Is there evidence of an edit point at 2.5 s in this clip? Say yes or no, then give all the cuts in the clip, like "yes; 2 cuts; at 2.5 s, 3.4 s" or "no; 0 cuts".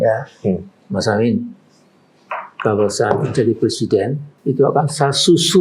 no; 1 cut; at 4.3 s